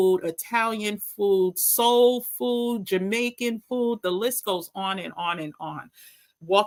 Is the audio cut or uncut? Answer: uncut